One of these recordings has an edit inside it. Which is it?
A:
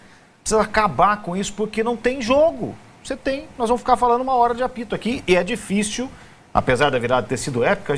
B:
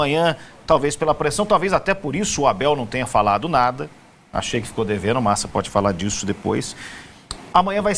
A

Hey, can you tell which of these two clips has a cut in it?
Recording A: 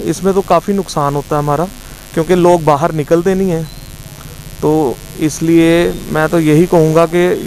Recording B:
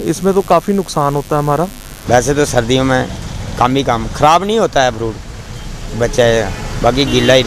B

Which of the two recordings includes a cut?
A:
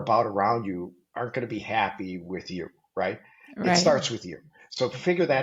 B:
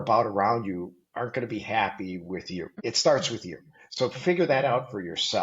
B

